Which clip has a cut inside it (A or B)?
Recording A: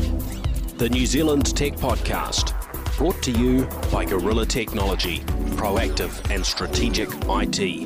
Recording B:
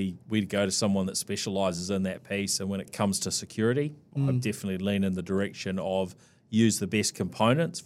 B